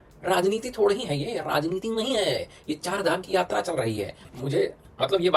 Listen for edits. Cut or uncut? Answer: cut